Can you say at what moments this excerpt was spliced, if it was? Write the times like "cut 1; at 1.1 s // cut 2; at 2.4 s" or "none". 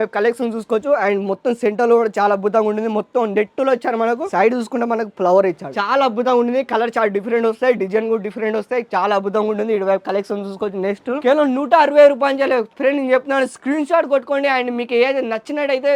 cut 1; at 11.2 s